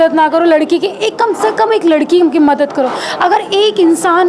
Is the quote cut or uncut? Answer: uncut